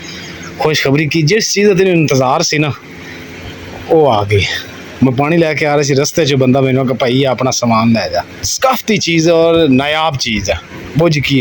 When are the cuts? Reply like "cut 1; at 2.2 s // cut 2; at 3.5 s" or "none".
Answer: cut 1; at 8.4 s